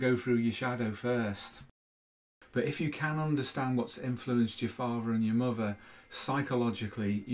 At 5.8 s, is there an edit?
no; 1 cut; at 1.8 s

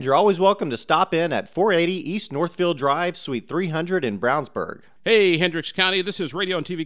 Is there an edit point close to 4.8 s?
yes; 1 cut; at 4.8 s

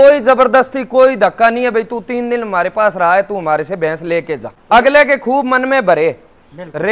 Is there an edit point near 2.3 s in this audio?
no; 1 cut; at 4.5 s

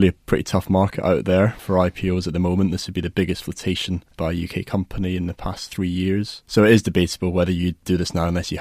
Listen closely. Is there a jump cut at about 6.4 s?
yes; 4 cuts; at 1.6 s, 4.1 s, 6.4 s, 7.8 s

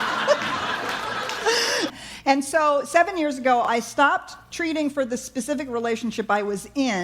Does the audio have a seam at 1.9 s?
yes; 1 cut; at 1.9 s

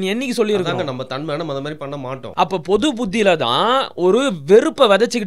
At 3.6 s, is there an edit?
no; 1 cut; at 2.2 s

